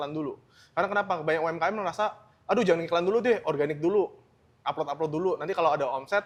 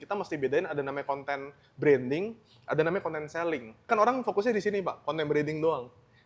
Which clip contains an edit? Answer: second; 1 cut; at 3.9 s

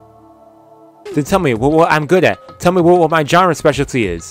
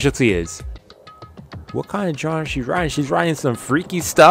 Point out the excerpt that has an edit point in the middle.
first; 1 cut; at 1.0 s

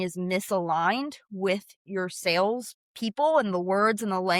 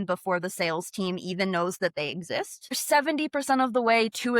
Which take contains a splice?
second; 1 cut; at 2.8 s

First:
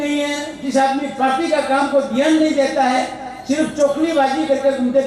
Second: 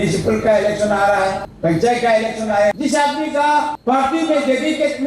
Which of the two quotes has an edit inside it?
second; 3 cuts; at 1.5 s, 2.7 s, 3.8 s

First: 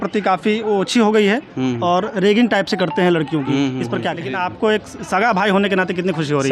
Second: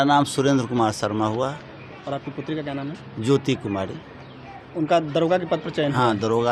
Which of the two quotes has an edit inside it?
first; 1 cut; at 4.3 s

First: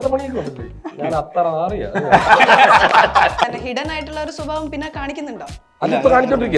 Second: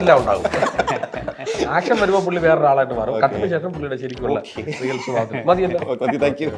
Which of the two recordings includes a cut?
first; 1 cut; at 3.4 s

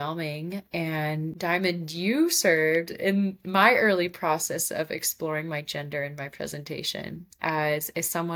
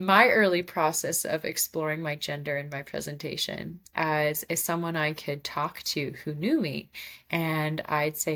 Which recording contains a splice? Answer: first; 1 cut; at 1.3 s

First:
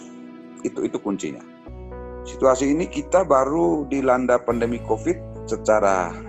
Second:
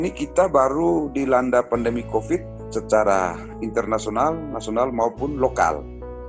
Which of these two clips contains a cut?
first; 1 cut; at 1.5 s

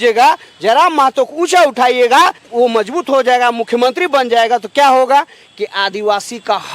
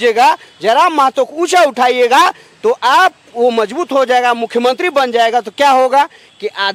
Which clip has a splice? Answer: first; 1 cut; at 2.4 s

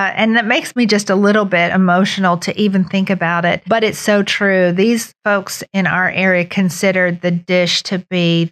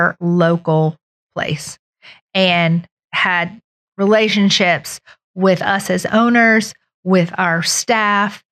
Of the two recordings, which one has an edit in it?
first; 2 cuts; at 3.6 s, 5.1 s

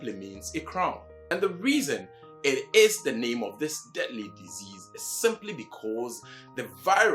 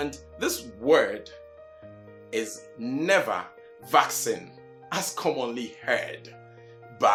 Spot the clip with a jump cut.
first; 1 cut; at 1.2 s

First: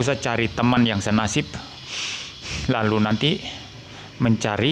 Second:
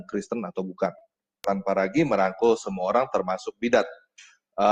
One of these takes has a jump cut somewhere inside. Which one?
second; 1 cut; at 1.4 s

